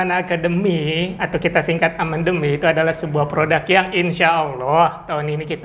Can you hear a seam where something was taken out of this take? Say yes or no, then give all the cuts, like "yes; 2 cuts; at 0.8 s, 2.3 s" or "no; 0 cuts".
no; 0 cuts